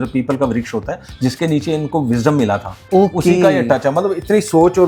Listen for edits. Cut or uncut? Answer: uncut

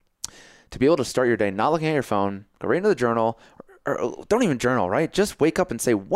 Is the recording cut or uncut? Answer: uncut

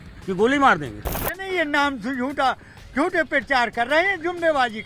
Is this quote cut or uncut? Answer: cut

